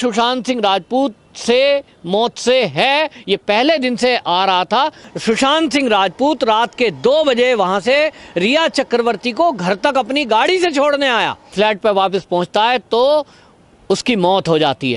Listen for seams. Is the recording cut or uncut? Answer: cut